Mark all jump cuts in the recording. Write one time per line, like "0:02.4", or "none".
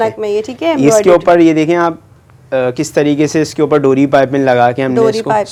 none